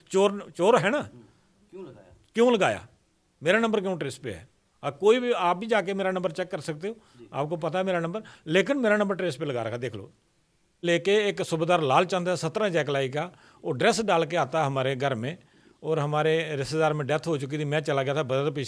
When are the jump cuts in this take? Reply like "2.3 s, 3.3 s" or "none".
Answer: 10.8 s